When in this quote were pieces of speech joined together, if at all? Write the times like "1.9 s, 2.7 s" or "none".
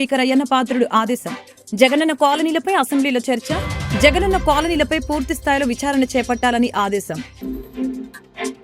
7.2 s